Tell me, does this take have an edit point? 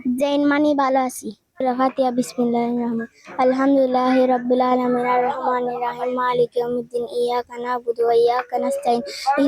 yes; 1 cut; at 1.5 s

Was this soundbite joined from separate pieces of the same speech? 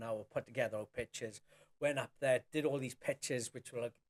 no; 0 cuts

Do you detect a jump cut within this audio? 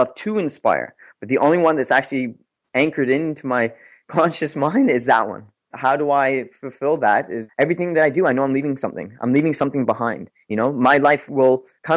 yes; 2 cuts; at 5.7 s, 7.4 s

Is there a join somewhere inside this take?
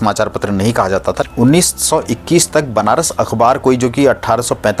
yes; 1 cut; at 1.2 s

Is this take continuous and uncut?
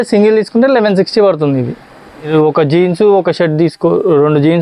no; 1 cut; at 2.3 s

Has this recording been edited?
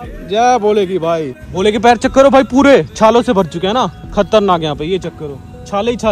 yes; 1 cut; at 1.4 s

